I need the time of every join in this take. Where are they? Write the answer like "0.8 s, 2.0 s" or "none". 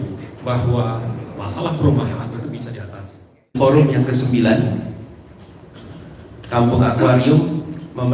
3.6 s